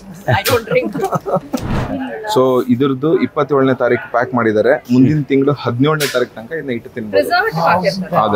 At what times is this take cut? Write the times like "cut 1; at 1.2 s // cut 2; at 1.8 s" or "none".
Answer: cut 1; at 1.7 s